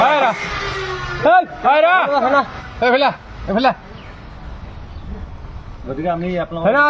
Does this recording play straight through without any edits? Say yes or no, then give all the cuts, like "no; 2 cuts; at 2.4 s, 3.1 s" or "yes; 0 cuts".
yes; 0 cuts